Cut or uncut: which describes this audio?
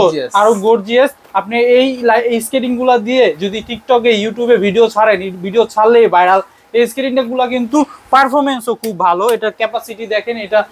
uncut